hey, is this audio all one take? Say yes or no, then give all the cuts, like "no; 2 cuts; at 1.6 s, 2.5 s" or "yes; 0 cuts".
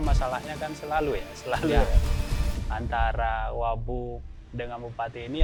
yes; 0 cuts